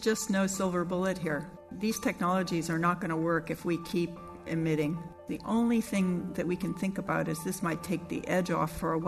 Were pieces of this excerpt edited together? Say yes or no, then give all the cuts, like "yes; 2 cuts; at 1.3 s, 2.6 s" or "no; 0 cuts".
yes; 2 cuts; at 1.6 s, 5.2 s